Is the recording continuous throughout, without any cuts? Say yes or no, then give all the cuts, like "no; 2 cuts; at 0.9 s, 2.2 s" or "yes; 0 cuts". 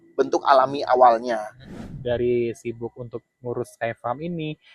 no; 1 cut; at 1.7 s